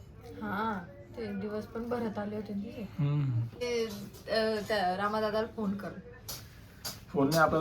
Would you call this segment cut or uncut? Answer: cut